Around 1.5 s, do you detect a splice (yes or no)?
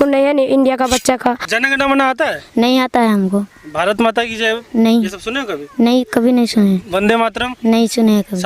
yes